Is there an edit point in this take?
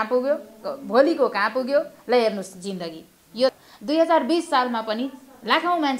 yes; 1 cut; at 3.5 s

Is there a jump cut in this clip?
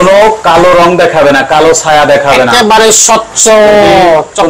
no; 0 cuts

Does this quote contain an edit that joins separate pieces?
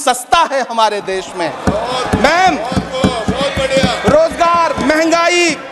no; 0 cuts

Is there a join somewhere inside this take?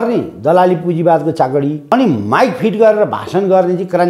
yes; 1 cut; at 1.9 s

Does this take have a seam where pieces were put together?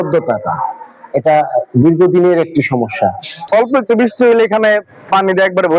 yes; 1 cut; at 3.4 s

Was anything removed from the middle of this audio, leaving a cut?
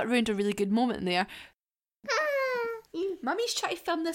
yes; 1 cut; at 1.5 s

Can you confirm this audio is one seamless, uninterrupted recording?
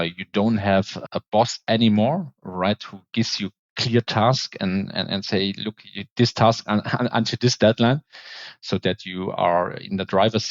no; 1 cut; at 1.0 s

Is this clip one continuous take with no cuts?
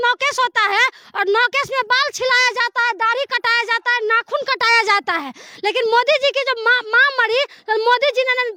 yes; 0 cuts

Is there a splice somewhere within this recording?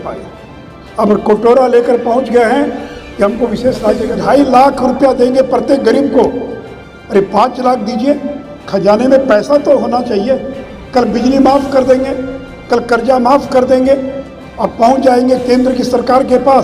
yes; 1 cut; at 4.1 s

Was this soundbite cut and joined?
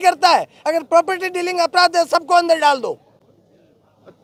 no; 0 cuts

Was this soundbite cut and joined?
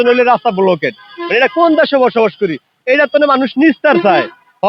no; 0 cuts

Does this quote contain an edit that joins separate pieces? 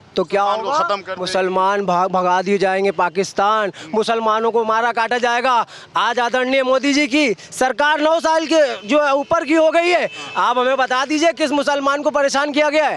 no; 0 cuts

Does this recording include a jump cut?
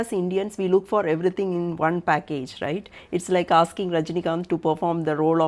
no; 0 cuts

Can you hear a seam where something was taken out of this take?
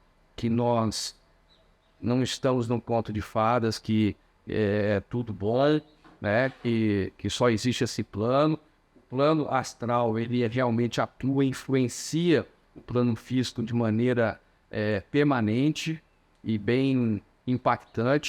no; 0 cuts

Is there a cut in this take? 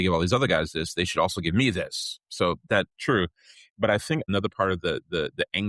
yes; 1 cut; at 4.2 s

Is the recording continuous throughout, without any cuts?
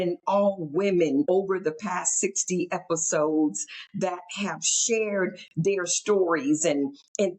no; 1 cut; at 1.3 s

